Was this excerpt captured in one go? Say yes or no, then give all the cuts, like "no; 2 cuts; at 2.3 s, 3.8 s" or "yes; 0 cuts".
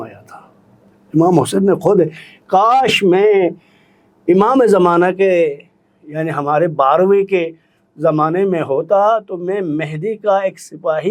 yes; 0 cuts